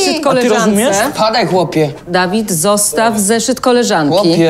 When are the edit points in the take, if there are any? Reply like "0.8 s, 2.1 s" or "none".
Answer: 2.0 s